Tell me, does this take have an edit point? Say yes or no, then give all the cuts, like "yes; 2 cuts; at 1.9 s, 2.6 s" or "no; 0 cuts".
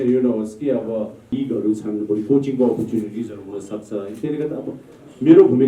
yes; 1 cut; at 1.3 s